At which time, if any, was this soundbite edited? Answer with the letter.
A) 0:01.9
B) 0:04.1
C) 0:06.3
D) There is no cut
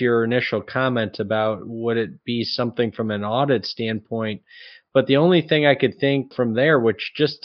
C